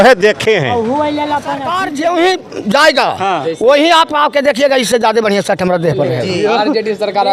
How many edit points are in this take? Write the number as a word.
one